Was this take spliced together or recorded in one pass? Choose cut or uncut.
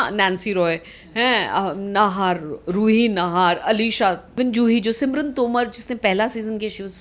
cut